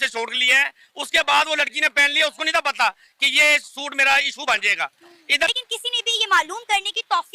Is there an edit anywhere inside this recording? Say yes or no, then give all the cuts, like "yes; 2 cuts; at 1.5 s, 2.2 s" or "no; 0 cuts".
yes; 1 cut; at 5.5 s